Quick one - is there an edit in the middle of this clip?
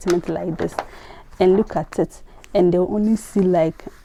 no; 0 cuts

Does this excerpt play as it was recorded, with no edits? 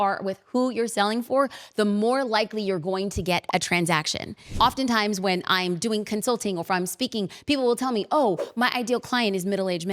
no; 1 cut; at 4.5 s

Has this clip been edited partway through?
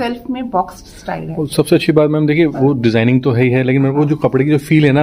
no; 0 cuts

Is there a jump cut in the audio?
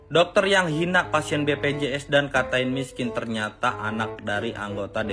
no; 0 cuts

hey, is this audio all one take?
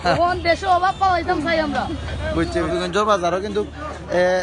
no; 1 cut; at 2.7 s

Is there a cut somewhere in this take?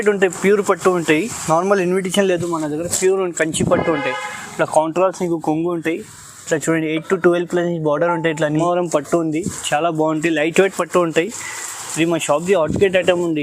yes; 1 cut; at 8.5 s

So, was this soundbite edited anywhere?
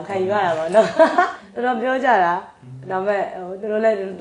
yes; 1 cut; at 1.4 s

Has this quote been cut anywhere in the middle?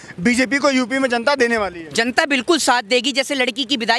no; 0 cuts

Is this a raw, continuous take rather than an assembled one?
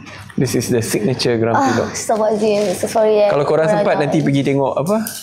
yes; 0 cuts

